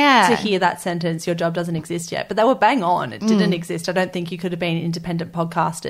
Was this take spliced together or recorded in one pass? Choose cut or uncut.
uncut